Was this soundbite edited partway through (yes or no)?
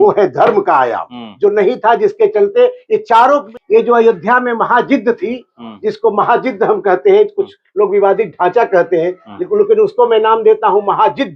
yes